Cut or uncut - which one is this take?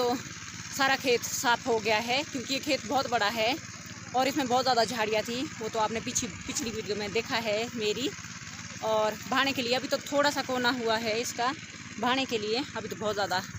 uncut